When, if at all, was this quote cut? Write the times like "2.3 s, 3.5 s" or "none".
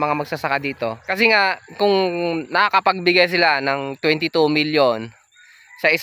1.0 s